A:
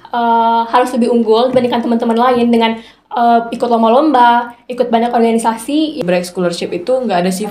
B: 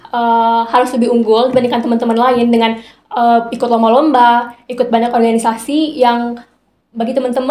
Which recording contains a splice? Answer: A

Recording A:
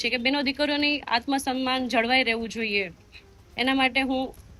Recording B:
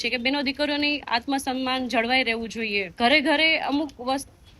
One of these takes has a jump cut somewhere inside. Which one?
B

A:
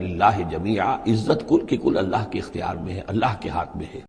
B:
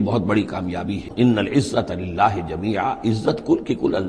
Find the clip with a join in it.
B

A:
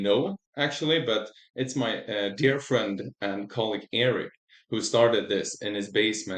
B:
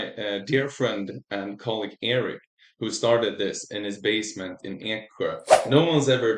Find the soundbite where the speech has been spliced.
B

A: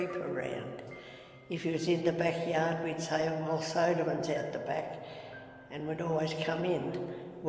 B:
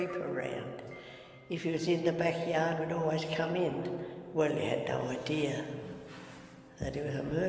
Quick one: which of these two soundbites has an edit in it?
B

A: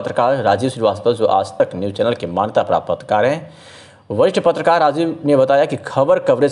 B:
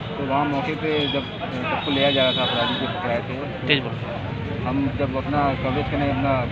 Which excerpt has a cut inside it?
A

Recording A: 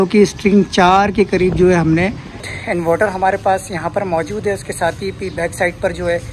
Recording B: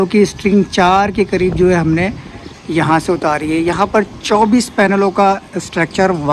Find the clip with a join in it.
A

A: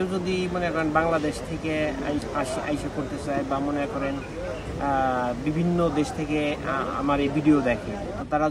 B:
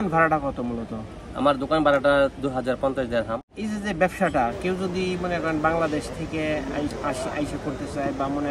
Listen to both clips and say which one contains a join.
B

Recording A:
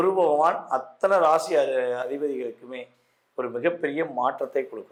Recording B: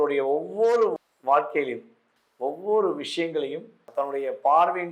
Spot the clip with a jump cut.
B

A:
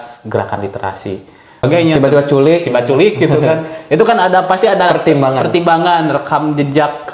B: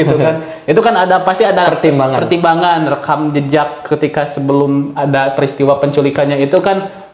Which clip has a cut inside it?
A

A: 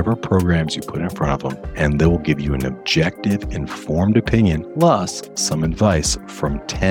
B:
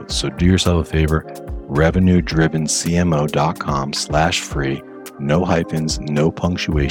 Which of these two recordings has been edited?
A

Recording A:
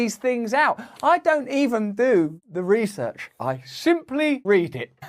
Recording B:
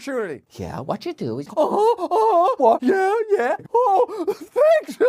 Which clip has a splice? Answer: B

